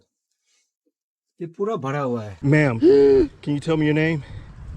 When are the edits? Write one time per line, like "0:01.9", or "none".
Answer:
0:02.3